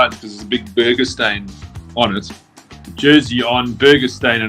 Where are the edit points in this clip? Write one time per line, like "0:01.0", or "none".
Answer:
0:02.9

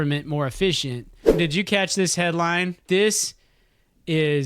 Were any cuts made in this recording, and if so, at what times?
0:01.2

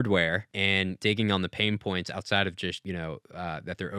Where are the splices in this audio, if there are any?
0:00.9
0:02.8

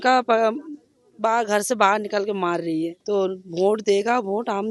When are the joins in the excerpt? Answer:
0:03.0

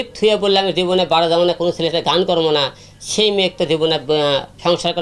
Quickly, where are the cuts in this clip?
none

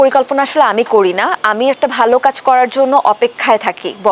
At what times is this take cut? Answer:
none

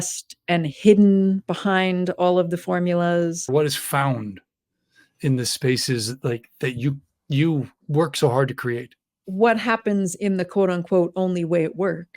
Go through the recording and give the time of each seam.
0:03.4
0:09.1

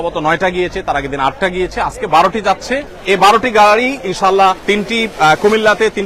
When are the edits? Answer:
0:02.9
0:04.6

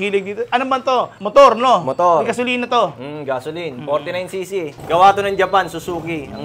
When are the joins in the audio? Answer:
0:01.2
0:04.8

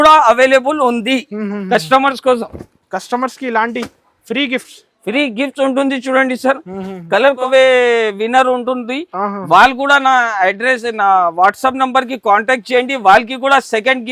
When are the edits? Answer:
0:07.4

